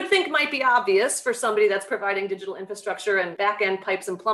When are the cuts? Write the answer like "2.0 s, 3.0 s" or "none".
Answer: 3.3 s